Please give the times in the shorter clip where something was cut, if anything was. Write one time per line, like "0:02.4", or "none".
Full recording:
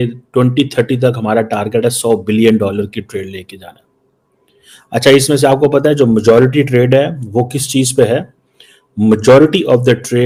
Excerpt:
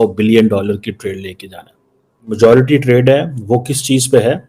0:02.3